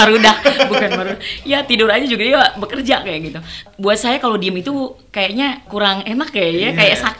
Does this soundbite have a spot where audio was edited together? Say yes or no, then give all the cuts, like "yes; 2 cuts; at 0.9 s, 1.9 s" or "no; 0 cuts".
yes; 2 cuts; at 3.7 s, 5.7 s